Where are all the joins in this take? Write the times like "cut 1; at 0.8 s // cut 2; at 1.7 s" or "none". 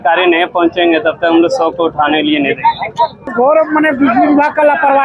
cut 1; at 3.3 s